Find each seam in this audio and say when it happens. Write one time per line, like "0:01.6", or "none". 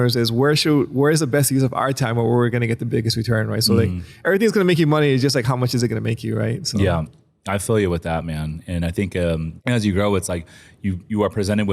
0:09.5